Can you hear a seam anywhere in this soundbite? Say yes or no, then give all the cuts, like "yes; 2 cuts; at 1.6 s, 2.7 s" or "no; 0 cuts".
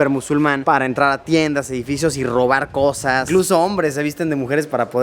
yes; 1 cut; at 3.3 s